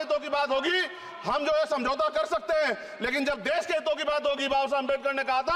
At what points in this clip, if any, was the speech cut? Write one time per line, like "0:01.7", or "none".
none